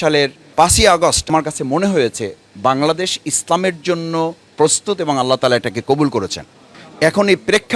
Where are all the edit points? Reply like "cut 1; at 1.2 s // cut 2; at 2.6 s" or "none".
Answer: cut 1; at 1.3 s